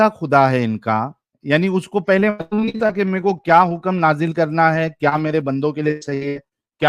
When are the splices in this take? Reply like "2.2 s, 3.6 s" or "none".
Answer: 1.3 s